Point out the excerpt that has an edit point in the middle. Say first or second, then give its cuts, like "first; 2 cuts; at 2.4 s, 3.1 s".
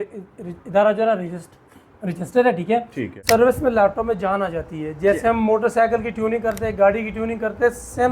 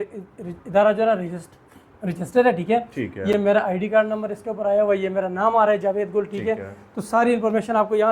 first; 1 cut; at 3.2 s